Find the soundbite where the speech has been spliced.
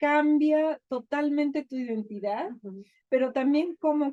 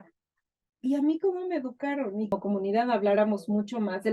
second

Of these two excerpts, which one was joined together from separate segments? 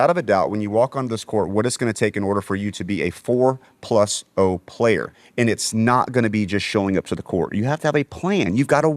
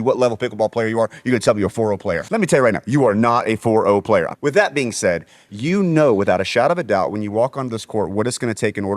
second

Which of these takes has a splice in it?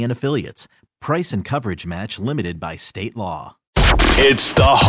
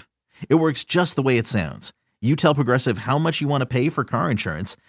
first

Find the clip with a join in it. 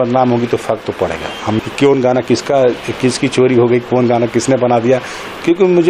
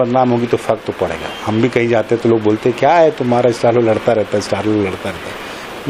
first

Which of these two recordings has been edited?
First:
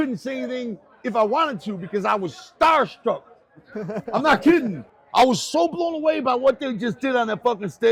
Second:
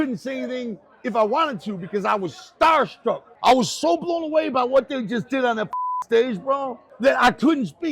second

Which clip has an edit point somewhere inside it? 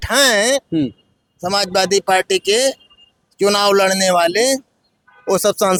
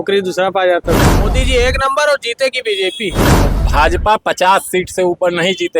second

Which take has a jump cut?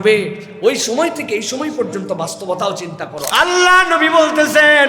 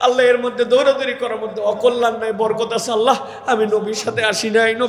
first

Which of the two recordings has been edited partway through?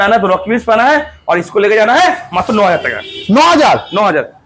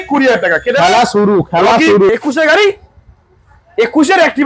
second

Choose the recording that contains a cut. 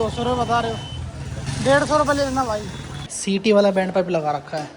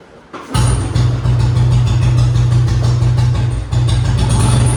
first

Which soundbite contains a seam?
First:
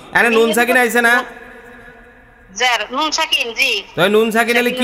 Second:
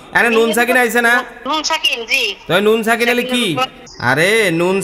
second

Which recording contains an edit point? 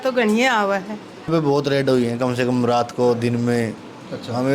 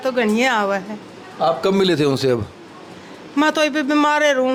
first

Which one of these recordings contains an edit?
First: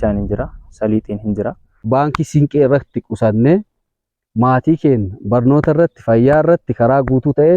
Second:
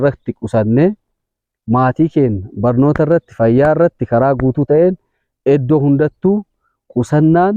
first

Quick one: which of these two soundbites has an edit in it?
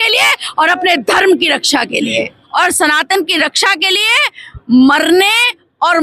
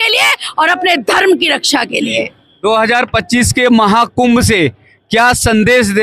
first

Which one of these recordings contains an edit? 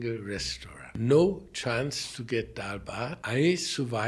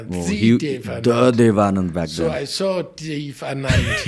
first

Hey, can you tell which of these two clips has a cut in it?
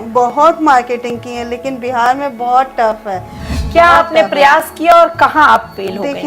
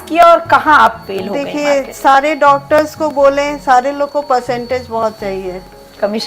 first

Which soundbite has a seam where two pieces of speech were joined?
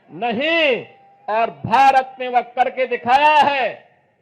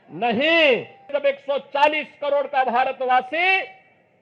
second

